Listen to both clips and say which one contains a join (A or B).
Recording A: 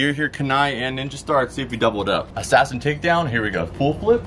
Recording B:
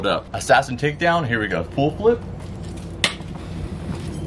B